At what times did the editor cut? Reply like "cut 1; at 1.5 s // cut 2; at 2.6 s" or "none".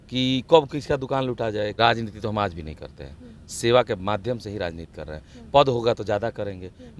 cut 1; at 1.7 s

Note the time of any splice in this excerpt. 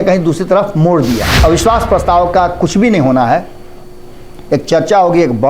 cut 1; at 1.3 s

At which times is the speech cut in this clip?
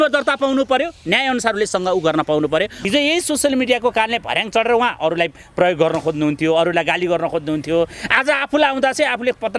cut 1; at 2.9 s

